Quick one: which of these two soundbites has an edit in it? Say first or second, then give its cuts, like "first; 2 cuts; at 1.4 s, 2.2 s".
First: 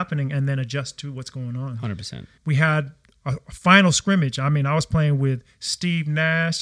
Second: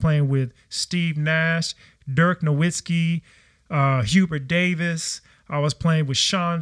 first; 1 cut; at 2.3 s